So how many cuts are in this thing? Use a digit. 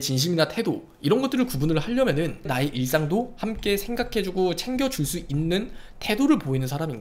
1